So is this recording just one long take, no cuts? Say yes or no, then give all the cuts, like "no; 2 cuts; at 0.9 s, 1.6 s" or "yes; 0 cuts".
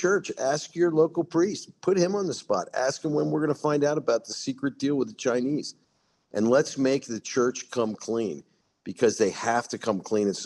yes; 0 cuts